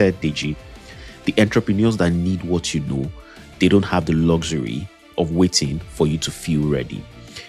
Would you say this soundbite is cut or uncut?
cut